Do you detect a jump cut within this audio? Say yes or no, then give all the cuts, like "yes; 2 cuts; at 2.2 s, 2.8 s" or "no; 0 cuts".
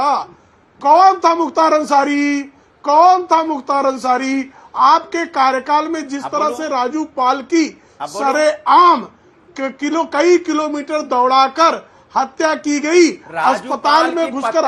no; 0 cuts